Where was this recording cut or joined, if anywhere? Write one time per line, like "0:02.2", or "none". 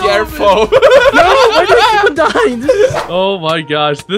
0:03.0